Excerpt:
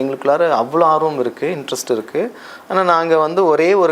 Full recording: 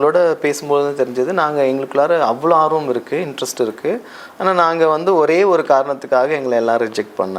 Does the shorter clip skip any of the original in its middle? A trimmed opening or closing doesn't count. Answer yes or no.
no